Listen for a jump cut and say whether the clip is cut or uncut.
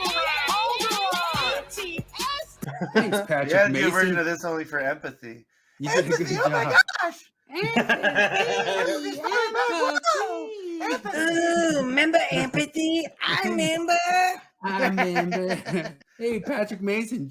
cut